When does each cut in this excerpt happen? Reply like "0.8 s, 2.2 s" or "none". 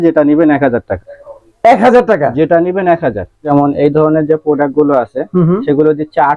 3.4 s